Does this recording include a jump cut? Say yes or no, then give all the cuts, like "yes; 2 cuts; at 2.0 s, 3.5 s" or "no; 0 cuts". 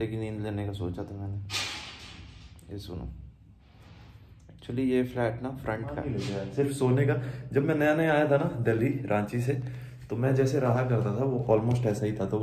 yes; 1 cut; at 6.2 s